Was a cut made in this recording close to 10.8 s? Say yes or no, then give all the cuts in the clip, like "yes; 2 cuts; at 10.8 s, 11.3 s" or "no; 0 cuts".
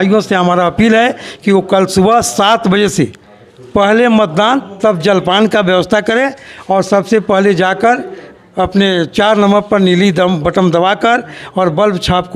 no; 0 cuts